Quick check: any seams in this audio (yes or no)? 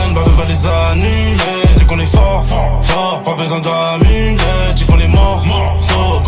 no